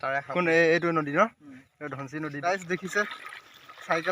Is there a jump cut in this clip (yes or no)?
yes